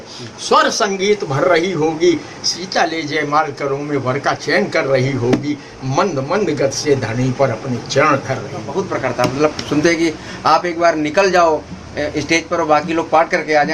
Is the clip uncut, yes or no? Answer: no